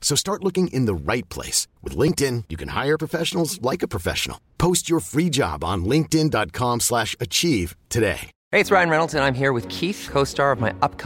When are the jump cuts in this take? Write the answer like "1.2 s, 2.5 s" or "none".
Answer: 8.3 s